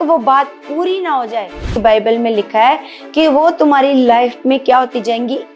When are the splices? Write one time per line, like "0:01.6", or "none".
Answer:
0:01.7